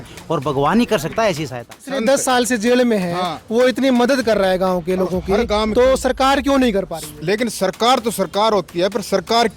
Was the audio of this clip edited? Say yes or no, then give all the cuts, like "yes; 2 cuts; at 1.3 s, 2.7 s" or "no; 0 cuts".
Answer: yes; 1 cut; at 1.9 s